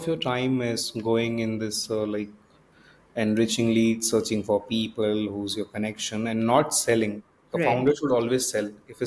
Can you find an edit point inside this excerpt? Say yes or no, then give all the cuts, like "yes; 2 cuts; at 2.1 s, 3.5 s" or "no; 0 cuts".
no; 0 cuts